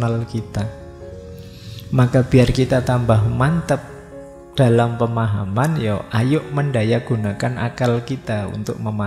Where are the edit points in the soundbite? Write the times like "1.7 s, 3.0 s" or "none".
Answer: none